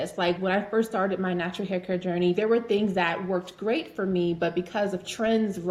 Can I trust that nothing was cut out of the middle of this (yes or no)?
yes